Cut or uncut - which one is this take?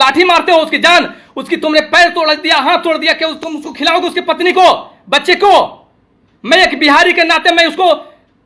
uncut